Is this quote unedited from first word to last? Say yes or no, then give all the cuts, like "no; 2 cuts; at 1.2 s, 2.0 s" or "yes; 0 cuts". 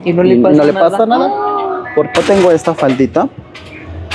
no; 1 cut; at 2.1 s